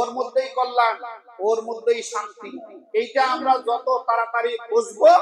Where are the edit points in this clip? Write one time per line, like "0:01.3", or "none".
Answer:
none